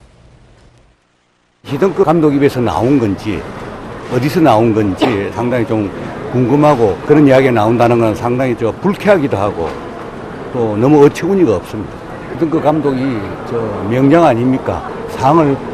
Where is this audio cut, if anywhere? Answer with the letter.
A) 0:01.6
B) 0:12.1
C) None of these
A